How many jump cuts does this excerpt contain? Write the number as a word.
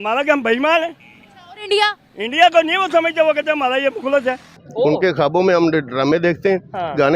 one